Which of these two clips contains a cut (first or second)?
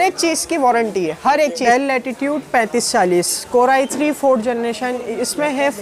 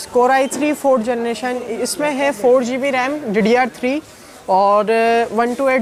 first